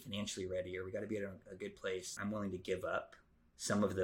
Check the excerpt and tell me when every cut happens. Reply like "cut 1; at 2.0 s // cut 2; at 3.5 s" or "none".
cut 1; at 2.2 s